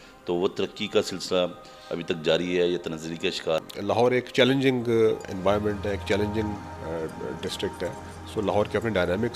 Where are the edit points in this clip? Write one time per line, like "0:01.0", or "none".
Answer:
0:03.7